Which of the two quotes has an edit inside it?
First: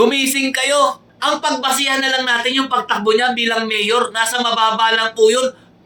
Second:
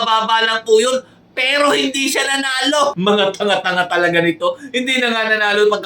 second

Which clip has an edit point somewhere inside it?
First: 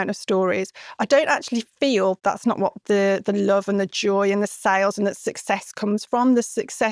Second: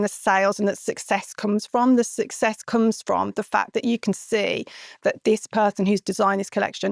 first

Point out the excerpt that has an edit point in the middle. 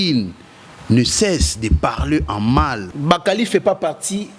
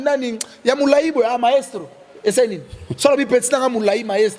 first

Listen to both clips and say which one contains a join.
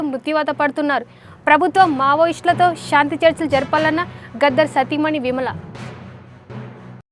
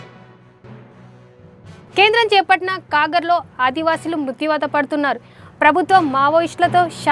second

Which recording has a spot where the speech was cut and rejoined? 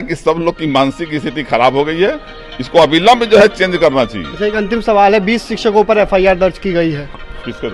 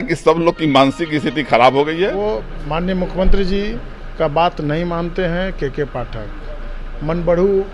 second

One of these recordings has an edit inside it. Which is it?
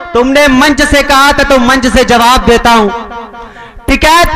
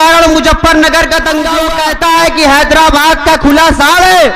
second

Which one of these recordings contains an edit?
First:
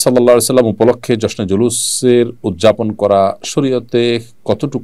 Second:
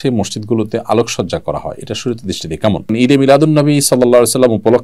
second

